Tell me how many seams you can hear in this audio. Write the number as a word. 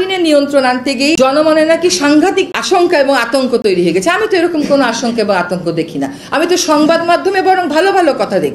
two